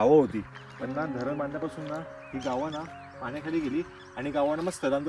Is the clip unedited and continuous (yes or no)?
yes